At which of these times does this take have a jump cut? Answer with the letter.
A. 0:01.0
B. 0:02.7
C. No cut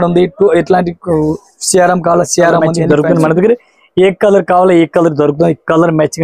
B